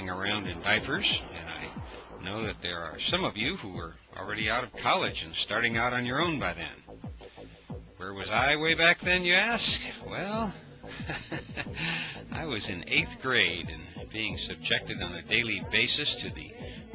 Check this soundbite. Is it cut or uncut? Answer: cut